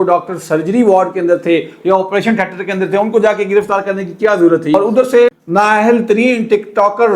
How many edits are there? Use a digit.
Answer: 1